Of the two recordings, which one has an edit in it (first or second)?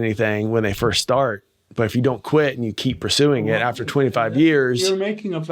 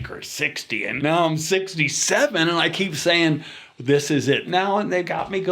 second